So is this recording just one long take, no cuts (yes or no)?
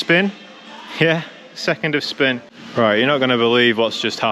no